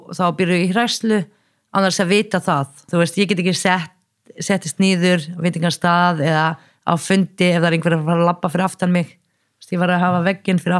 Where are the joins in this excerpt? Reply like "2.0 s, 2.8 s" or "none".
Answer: 2.8 s